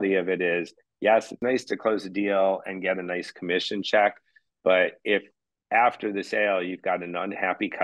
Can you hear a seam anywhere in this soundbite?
yes; 1 cut; at 1.4 s

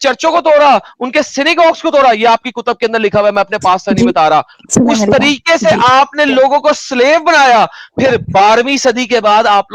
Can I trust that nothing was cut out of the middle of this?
yes; 0 cuts

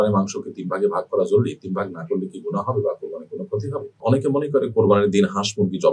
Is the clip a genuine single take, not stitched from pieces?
no; 1 cut; at 4.0 s

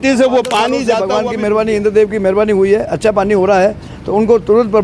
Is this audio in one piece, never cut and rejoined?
no; 1 cut; at 1.1 s

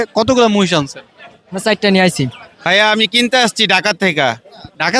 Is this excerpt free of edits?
no; 1 cut; at 2.5 s

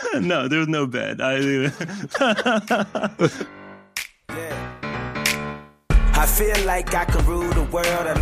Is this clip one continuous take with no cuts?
no; 1 cut; at 3.4 s

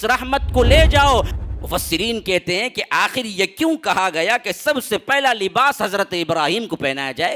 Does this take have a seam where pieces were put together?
yes; 1 cut; at 1.3 s

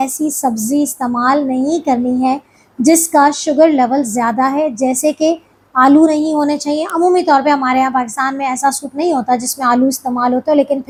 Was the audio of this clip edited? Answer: no; 0 cuts

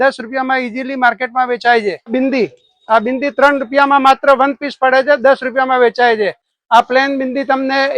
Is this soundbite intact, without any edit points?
no; 2 cuts; at 2.1 s, 6.5 s

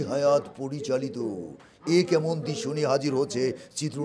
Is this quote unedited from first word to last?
yes; 0 cuts

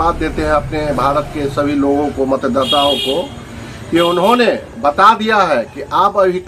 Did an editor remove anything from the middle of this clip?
no; 0 cuts

